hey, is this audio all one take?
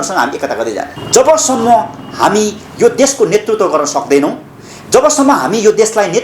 no; 1 cut; at 0.9 s

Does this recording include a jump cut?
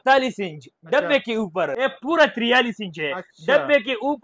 yes; 1 cut; at 1.7 s

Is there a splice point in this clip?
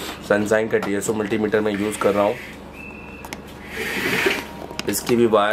no; 0 cuts

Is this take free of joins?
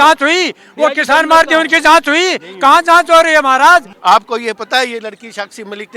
no; 1 cut; at 3.9 s

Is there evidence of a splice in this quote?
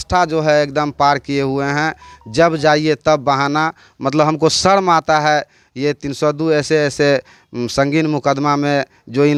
no; 0 cuts

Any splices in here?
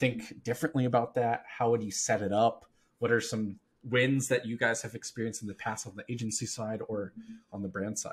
no; 0 cuts

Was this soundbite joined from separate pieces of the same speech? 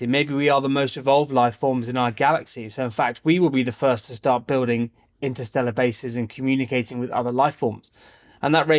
no; 0 cuts

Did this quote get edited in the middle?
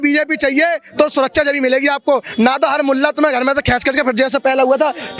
no; 0 cuts

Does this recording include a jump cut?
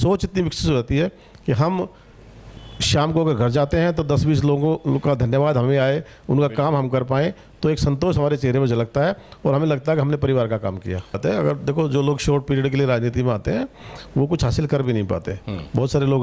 yes; 1 cut; at 11.2 s

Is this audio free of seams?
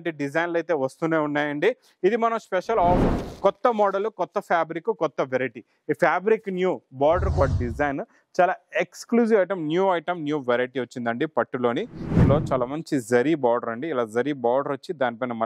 no; 3 cuts; at 3.0 s, 7.4 s, 12.2 s

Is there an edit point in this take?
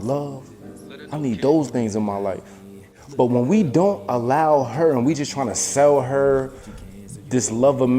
yes; 1 cut; at 3.0 s

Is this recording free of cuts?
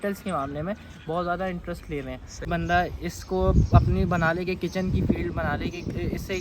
no; 1 cut; at 2.5 s

